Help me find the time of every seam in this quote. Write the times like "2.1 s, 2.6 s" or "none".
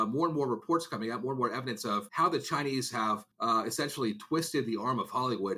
2.1 s, 3.3 s